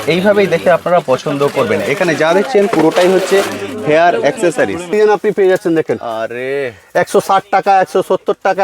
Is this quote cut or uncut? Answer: cut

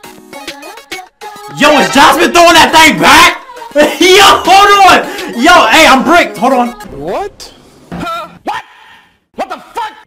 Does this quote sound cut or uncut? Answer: uncut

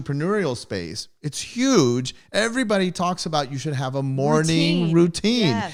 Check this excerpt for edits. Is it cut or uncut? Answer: uncut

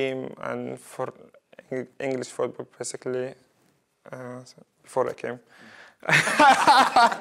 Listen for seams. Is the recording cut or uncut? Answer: uncut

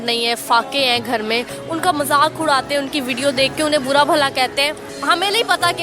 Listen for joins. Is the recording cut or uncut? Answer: cut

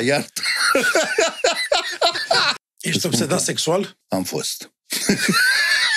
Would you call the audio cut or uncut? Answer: cut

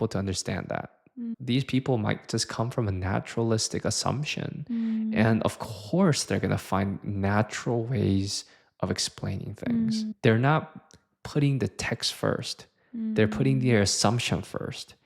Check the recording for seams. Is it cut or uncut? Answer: cut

